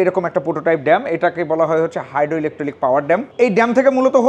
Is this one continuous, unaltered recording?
yes; 0 cuts

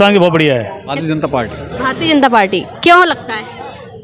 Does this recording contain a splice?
yes; 1 cut; at 1.0 s

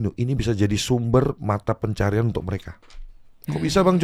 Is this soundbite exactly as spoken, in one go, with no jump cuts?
yes; 0 cuts

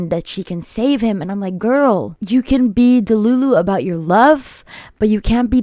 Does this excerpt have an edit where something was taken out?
no; 0 cuts

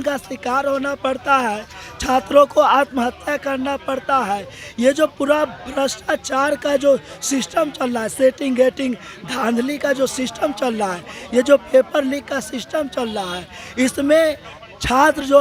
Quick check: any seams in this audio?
no; 0 cuts

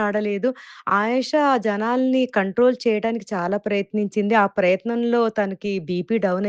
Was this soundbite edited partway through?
no; 0 cuts

